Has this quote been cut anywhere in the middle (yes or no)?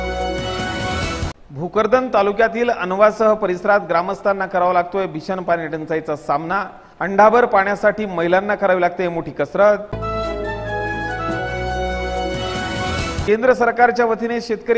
yes